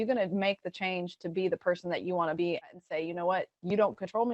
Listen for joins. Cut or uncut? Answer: cut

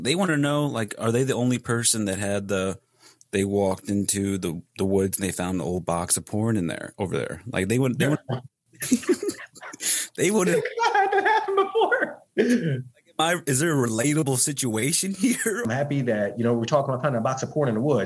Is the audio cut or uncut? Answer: cut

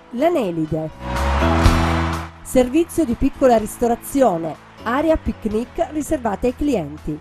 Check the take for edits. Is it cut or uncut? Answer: uncut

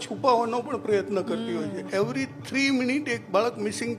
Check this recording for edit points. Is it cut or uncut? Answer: cut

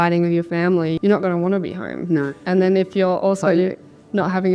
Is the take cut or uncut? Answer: cut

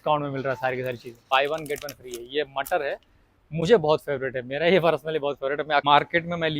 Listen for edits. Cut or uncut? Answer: cut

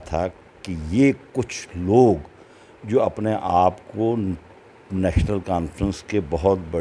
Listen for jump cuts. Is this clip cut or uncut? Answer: uncut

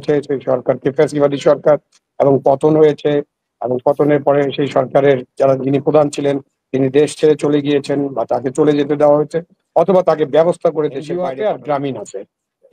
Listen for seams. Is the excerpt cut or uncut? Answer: cut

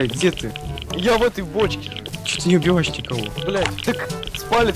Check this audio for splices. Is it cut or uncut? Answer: cut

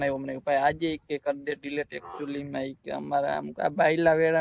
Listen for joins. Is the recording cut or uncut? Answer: uncut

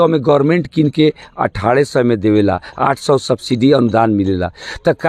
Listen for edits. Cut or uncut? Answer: uncut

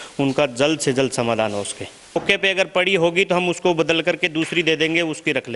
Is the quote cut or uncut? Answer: cut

